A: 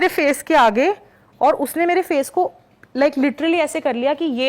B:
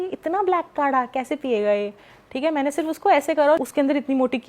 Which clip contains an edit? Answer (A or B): B